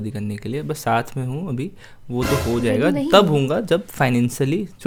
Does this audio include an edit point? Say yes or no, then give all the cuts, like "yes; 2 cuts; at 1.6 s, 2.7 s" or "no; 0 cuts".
no; 0 cuts